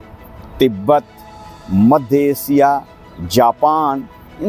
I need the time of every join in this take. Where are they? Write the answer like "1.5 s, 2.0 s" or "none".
none